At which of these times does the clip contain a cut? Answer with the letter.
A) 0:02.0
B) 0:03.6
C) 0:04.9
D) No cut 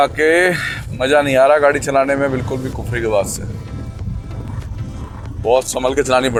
D